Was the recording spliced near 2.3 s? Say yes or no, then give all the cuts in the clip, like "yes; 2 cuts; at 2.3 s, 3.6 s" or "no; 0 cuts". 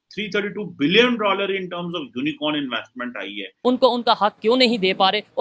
no; 1 cut; at 3.5 s